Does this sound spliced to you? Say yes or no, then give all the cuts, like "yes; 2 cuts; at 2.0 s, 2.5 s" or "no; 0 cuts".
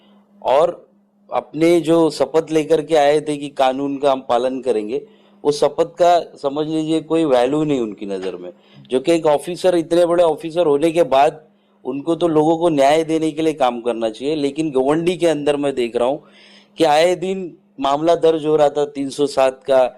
no; 0 cuts